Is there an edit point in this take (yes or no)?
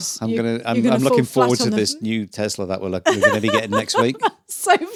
no